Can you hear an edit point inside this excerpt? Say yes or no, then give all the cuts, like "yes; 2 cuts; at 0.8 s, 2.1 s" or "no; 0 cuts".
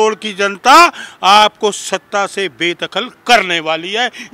no; 0 cuts